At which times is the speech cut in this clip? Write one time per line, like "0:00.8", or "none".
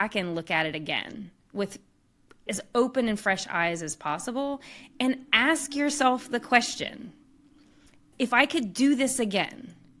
0:02.5
0:08.1